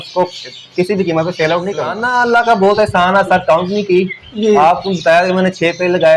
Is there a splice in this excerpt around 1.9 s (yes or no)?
yes